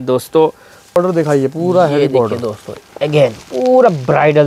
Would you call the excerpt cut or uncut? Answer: cut